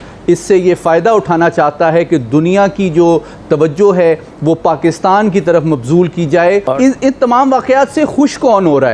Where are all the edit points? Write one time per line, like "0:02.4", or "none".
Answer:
0:06.7